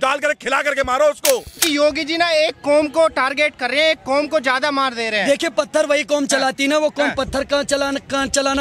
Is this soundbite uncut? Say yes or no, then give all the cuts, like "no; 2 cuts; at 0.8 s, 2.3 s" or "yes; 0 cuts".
no; 1 cut; at 1.6 s